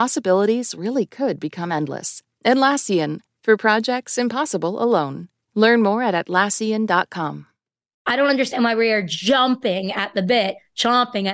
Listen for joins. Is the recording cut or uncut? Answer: cut